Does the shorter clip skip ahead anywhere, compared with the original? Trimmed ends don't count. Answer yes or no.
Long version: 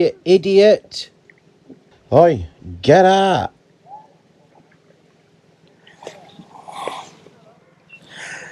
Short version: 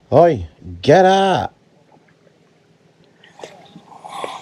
yes